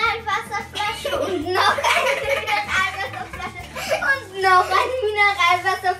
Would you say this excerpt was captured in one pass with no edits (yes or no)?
yes